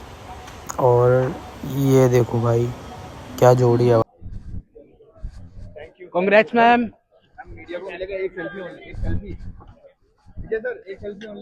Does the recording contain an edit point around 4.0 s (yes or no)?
yes